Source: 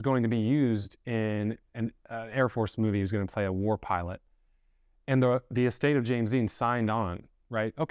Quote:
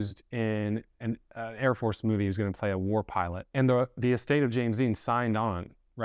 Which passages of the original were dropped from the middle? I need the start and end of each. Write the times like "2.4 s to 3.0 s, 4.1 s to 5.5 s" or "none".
4.1 s to 4.9 s